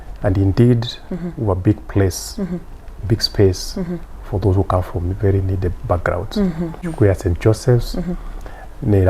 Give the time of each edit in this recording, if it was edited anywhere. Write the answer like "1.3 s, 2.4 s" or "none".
6.9 s